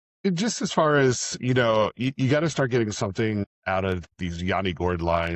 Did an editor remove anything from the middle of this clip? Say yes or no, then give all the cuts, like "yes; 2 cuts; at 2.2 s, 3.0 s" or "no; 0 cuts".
yes; 1 cut; at 3.9 s